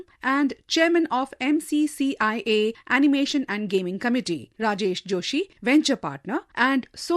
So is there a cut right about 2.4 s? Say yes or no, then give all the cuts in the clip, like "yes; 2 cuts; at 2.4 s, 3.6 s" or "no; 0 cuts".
no; 2 cuts; at 4.5 s, 5.5 s